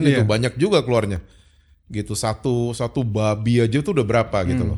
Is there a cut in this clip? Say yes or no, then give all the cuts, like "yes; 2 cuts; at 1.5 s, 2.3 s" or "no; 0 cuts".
no; 0 cuts